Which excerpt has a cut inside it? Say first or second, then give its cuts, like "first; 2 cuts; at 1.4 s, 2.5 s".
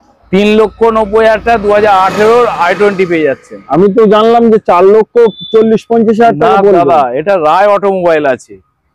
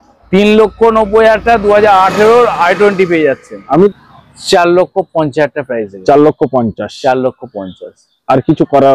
second; 1 cut; at 3.9 s